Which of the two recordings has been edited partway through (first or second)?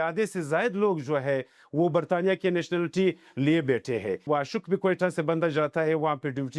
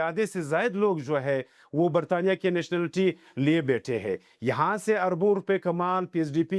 first